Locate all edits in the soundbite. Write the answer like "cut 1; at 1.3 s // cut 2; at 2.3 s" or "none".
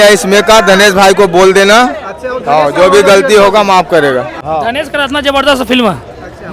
cut 1; at 4.7 s